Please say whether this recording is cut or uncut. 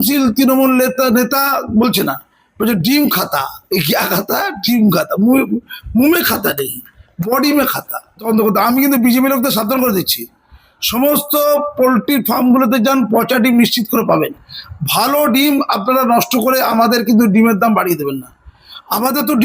cut